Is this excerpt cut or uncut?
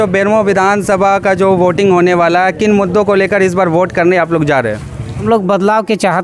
cut